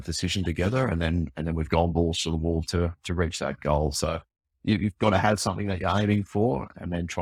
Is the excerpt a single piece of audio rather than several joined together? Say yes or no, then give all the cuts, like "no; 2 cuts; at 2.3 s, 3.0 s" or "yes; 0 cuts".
yes; 0 cuts